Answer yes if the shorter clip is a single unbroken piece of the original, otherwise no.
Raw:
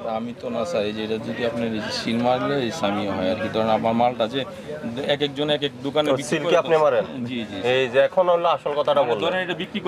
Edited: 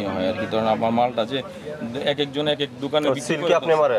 yes